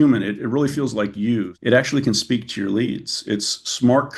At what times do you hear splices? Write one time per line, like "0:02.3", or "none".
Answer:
0:01.5